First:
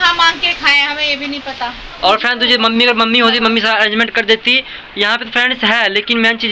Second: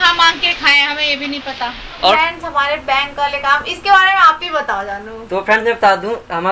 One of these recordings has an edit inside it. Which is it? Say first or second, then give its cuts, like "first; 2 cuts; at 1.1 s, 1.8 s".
second; 1 cut; at 2.1 s